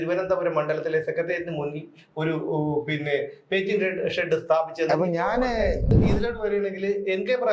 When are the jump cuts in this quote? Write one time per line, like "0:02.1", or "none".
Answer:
0:05.8